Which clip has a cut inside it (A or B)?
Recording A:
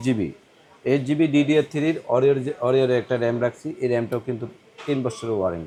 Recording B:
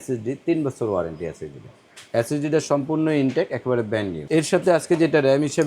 B